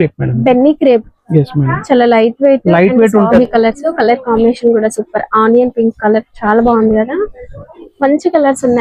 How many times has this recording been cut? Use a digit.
1